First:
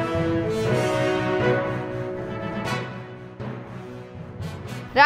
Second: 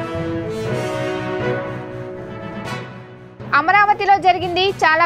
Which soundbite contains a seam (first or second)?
second